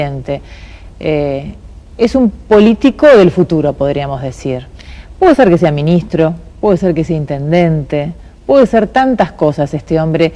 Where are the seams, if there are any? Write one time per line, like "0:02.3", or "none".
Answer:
0:06.5